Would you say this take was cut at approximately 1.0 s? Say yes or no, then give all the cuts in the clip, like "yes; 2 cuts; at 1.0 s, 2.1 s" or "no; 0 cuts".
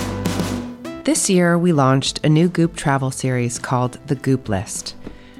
yes; 1 cut; at 1.0 s